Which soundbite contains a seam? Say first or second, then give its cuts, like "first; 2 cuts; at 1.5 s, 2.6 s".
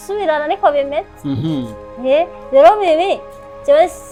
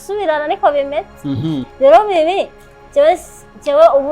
second; 1 cut; at 1.7 s